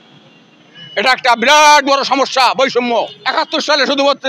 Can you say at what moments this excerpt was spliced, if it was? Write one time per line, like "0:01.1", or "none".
0:02.7